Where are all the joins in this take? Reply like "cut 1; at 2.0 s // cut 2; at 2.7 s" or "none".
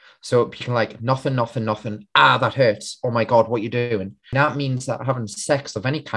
cut 1; at 4.2 s